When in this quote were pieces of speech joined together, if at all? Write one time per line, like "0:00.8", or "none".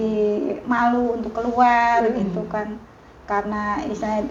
none